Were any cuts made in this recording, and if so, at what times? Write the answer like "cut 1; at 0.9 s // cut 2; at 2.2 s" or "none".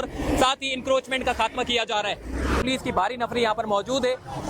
cut 1; at 2.6 s